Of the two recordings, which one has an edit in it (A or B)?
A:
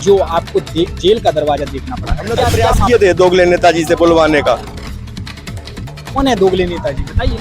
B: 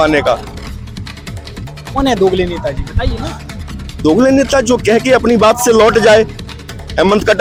A